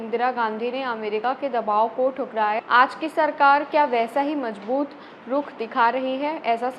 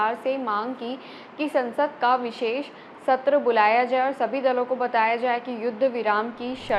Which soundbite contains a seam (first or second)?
first